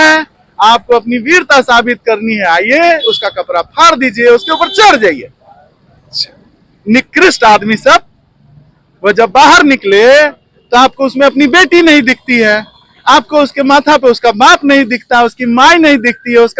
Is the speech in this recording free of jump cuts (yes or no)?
yes